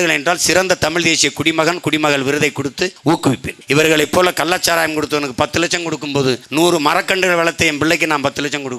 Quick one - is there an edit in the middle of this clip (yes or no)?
yes